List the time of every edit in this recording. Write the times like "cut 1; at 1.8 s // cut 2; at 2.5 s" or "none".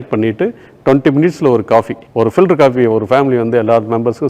cut 1; at 2.0 s